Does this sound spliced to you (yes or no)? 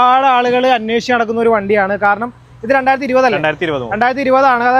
no